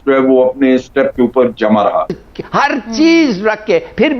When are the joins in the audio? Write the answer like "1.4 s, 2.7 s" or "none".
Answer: 2.2 s